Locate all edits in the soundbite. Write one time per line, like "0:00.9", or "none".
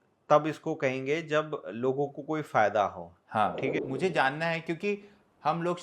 0:03.7